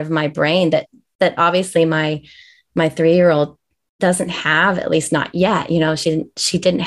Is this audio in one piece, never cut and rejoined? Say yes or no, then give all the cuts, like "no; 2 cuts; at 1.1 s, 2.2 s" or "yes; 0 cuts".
yes; 0 cuts